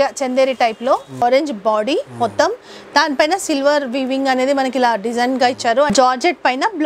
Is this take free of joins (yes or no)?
no